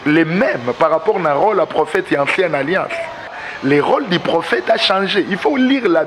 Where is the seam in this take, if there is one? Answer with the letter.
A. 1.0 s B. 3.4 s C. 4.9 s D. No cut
B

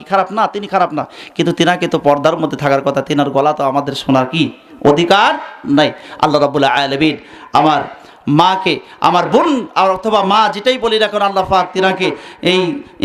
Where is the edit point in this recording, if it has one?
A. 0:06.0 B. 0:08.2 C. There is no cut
C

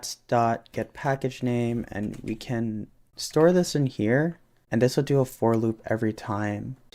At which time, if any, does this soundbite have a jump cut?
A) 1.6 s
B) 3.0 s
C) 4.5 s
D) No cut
D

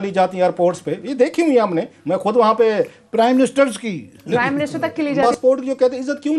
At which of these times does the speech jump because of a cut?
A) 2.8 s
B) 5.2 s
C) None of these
B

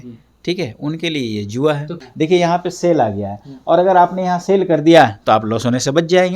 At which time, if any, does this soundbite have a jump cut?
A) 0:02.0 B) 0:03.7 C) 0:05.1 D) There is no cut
A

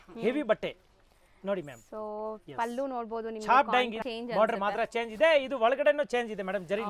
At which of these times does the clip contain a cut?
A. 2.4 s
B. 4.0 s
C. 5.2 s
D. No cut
B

